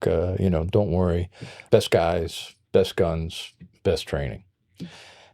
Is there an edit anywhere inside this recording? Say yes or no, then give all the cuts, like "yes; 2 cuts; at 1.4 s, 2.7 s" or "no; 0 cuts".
yes; 1 cut; at 1.5 s